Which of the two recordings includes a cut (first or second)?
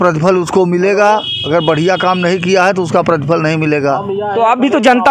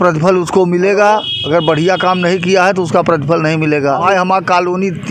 second